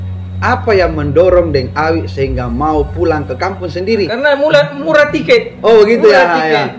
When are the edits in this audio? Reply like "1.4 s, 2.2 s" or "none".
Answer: 4.1 s